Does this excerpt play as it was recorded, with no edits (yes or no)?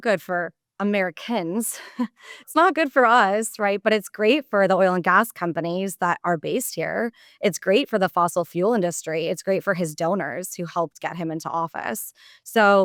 yes